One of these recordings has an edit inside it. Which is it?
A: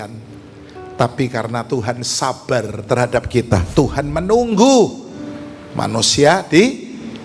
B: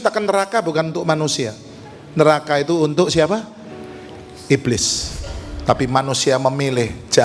A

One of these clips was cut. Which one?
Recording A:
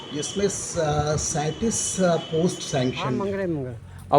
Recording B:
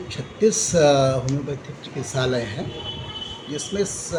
A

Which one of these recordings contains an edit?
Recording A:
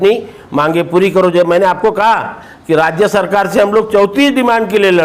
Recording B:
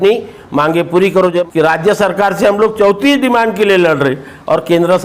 B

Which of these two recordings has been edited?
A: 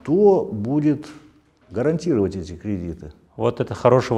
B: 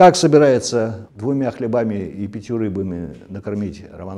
B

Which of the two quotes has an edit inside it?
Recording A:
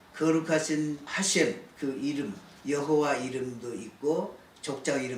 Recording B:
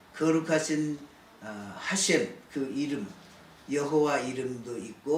A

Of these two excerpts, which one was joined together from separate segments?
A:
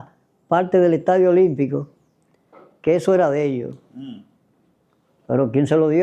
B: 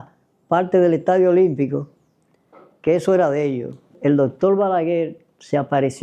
B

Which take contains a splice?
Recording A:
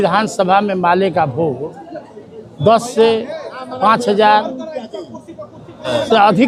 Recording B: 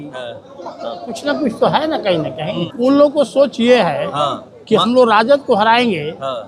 B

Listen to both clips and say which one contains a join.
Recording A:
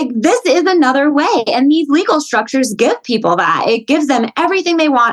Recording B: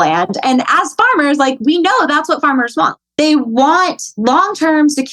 B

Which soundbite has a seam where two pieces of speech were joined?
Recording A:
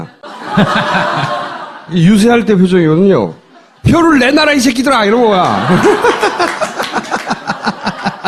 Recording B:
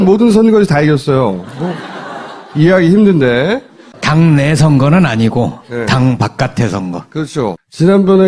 B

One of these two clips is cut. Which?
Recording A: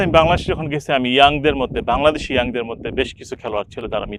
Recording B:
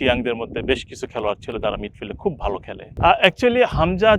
B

